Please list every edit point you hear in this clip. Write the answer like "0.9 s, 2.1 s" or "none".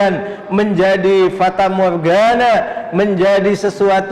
none